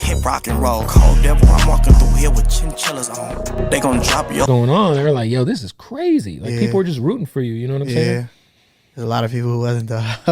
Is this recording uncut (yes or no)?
no